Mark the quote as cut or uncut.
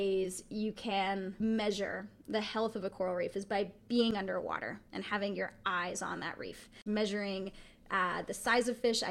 cut